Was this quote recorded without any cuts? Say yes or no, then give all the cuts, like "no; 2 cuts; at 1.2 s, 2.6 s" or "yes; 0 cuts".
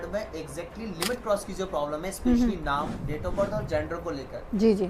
yes; 0 cuts